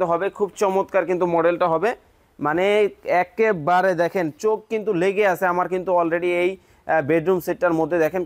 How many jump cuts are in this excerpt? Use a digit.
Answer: 0